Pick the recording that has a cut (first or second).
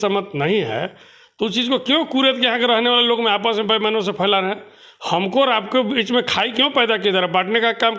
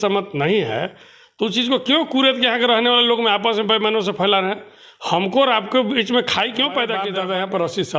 second